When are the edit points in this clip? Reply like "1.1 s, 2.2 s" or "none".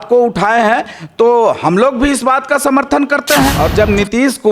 3.5 s